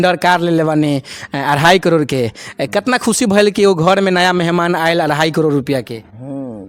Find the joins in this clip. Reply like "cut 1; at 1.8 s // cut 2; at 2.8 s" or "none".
none